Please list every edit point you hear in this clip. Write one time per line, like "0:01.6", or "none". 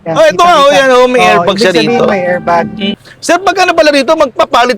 0:03.0